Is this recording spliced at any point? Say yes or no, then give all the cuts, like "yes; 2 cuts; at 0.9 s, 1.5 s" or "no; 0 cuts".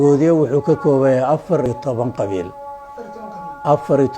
yes; 1 cut; at 1.7 s